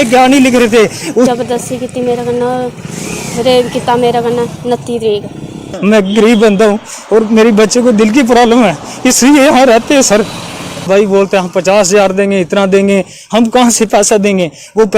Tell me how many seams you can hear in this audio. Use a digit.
3